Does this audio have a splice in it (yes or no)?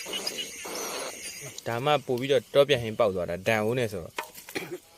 yes